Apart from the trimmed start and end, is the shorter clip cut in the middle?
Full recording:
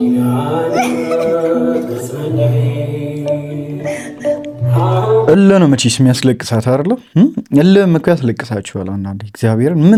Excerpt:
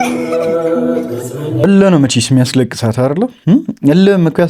yes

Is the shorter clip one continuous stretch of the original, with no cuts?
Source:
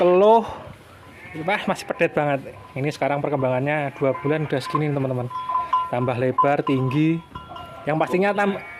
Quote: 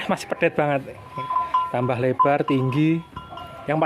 no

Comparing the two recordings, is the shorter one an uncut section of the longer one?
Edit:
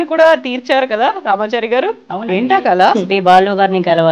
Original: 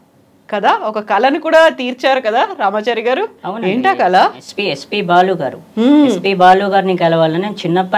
no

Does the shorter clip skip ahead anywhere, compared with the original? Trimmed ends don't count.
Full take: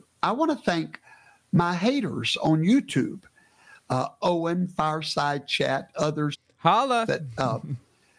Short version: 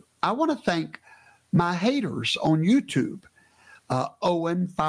no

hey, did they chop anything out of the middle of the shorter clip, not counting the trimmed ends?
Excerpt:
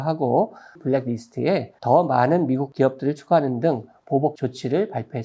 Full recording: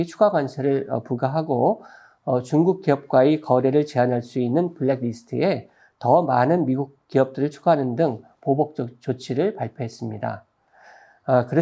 yes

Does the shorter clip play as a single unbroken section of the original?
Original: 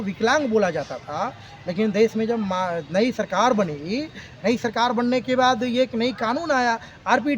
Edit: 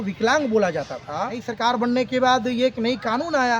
no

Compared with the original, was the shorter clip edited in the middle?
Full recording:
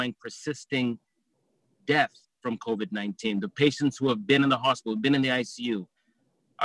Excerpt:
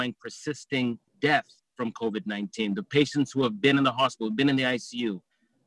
yes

